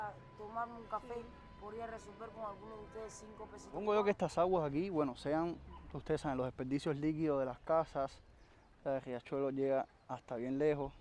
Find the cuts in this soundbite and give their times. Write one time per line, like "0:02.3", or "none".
0:03.7